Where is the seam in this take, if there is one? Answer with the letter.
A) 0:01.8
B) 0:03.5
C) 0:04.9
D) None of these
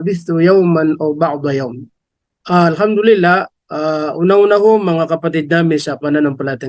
A